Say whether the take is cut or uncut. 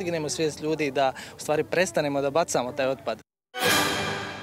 cut